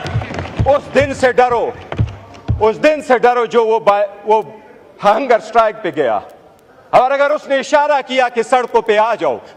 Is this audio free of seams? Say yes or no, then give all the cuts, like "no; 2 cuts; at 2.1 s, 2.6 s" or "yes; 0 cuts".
yes; 0 cuts